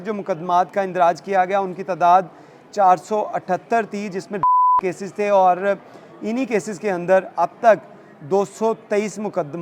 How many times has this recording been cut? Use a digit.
0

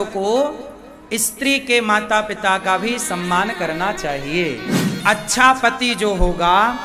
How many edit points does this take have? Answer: 1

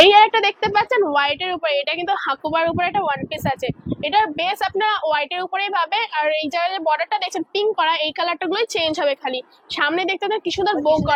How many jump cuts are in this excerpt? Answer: 0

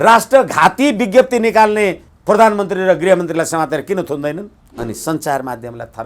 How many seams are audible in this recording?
2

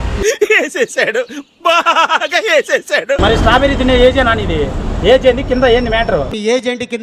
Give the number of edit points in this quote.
1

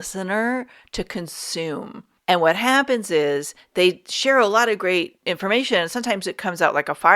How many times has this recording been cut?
2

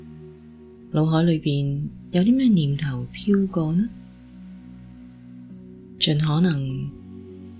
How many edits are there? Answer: 1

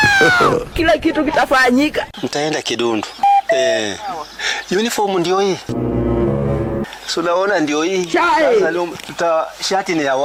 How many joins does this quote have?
0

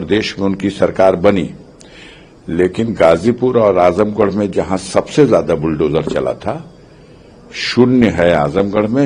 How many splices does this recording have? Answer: 0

